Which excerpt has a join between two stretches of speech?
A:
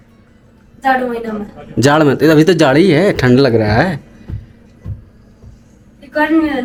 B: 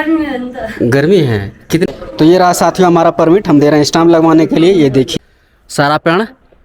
B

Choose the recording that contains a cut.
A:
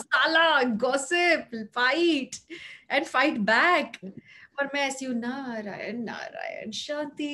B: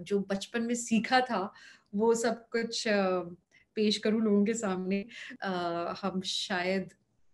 B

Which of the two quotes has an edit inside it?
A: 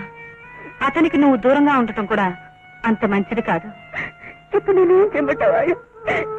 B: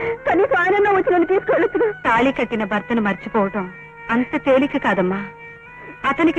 B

